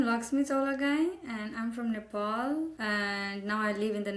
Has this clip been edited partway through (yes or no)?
yes